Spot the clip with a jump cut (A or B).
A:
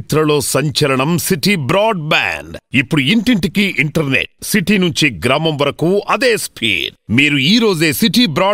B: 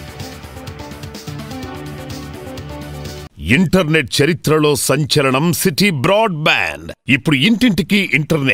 B